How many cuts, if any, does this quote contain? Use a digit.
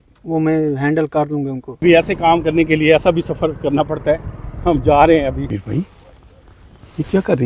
2